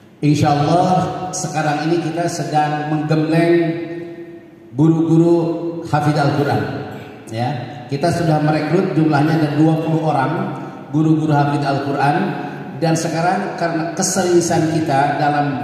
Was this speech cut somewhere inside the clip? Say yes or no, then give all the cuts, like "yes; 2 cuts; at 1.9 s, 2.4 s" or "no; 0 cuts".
no; 0 cuts